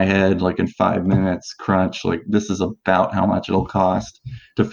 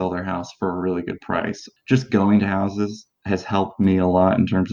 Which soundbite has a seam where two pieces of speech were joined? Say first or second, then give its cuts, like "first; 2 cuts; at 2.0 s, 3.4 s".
second; 1 cut; at 1.6 s